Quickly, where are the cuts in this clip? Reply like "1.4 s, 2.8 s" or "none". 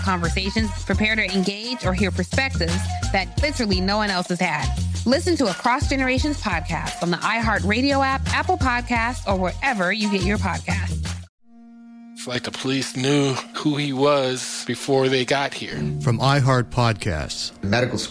11.2 s

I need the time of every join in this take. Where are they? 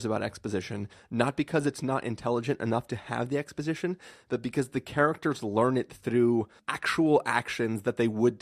6.6 s

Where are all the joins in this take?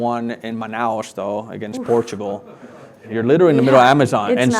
3.0 s

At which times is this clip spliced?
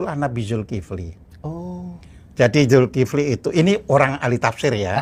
none

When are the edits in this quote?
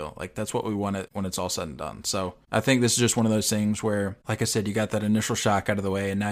1.1 s, 2.4 s, 4.2 s

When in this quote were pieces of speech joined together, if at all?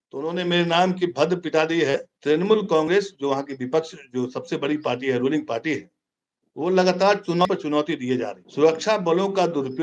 2.1 s, 8.4 s

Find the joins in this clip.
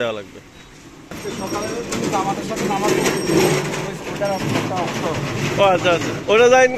1.1 s

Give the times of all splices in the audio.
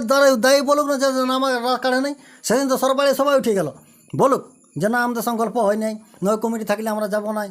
none

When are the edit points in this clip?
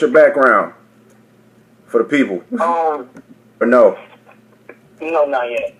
none

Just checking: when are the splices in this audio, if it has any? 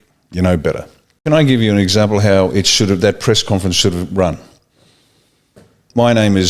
1.1 s

